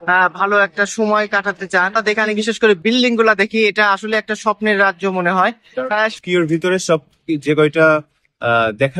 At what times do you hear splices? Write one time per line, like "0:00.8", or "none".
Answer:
0:02.0
0:06.2